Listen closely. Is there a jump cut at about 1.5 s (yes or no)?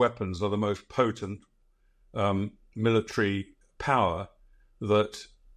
no